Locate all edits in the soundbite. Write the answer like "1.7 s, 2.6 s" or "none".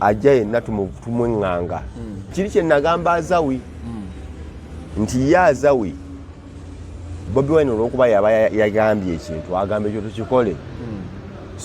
2.3 s

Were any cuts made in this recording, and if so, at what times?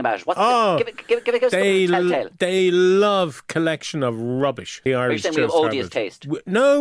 4.8 s

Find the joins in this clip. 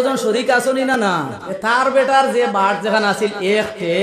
0.9 s

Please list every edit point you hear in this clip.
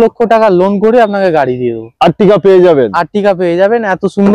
none

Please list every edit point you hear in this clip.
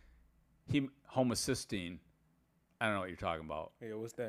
none

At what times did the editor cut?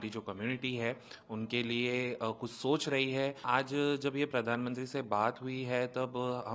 3.4 s

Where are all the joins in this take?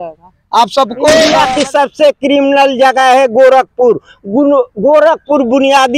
1.4 s

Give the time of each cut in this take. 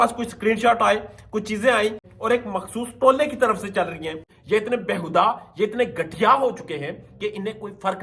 2.0 s, 4.3 s

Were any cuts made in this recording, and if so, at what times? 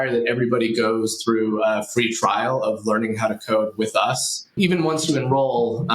4.5 s

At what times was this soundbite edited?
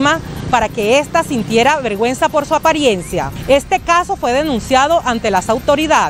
3.3 s

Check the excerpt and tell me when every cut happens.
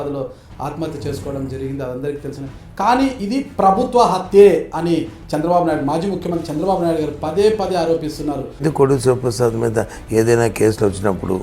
8.6 s

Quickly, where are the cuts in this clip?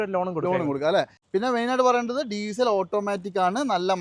1.2 s

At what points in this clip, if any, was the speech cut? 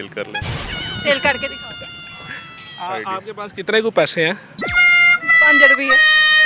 2.6 s

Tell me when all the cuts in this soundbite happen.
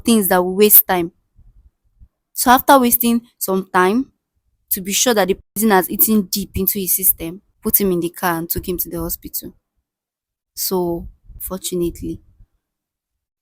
7.5 s, 11.4 s

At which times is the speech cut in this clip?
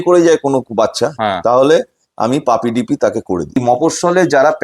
3.6 s

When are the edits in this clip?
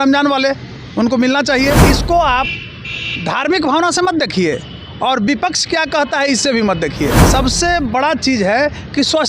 1.8 s, 7.2 s

